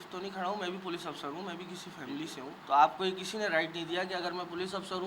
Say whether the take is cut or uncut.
cut